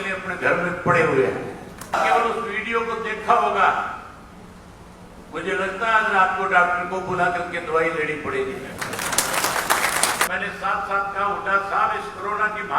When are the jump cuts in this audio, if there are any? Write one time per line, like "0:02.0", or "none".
0:02.0
0:10.3